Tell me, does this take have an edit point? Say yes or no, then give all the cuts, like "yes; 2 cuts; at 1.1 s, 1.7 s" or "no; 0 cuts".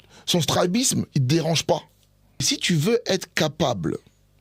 yes; 1 cut; at 2.5 s